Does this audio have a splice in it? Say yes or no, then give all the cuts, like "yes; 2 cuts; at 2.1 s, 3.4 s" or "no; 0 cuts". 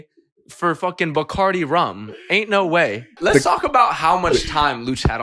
yes; 1 cut; at 3.1 s